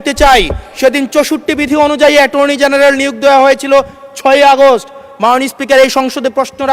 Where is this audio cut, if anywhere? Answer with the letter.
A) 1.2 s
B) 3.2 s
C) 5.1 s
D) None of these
D